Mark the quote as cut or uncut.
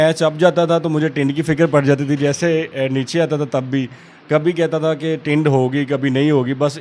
uncut